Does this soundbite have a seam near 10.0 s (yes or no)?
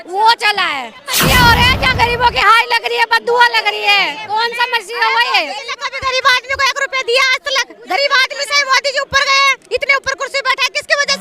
no